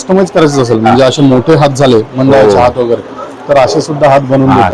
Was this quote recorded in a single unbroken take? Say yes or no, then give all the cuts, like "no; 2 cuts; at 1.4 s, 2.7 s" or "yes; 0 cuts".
yes; 0 cuts